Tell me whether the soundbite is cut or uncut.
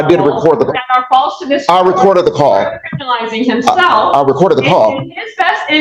uncut